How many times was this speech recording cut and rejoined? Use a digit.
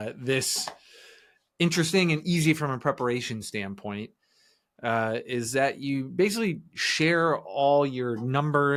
0